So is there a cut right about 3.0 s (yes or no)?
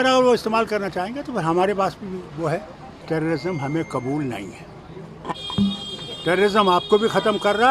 yes